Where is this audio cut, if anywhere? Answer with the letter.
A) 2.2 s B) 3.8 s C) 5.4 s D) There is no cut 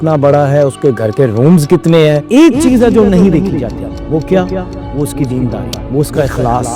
A